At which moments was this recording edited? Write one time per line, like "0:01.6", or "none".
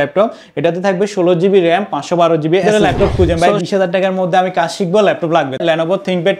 0:02.6
0:05.6